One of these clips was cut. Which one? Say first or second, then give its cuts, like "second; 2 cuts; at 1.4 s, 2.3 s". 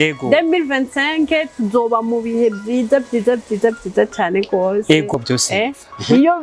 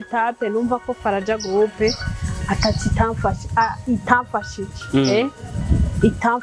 first; 1 cut; at 5.1 s